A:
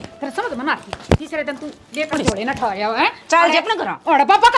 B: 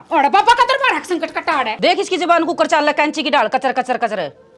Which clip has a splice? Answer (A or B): B